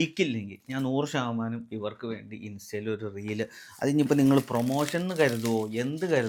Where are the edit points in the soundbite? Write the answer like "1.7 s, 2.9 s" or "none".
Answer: none